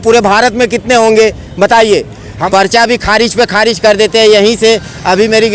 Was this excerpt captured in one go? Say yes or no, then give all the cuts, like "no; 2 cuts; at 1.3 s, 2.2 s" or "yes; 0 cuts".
no; 1 cut; at 2.4 s